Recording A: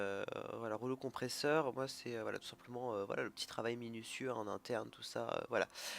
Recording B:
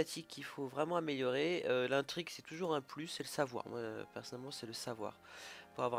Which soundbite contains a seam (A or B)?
A